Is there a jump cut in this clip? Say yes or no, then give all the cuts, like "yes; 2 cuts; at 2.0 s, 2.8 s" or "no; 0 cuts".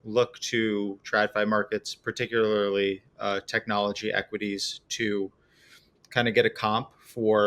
no; 0 cuts